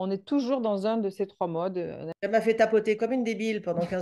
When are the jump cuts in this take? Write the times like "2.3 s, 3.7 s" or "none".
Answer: 2.3 s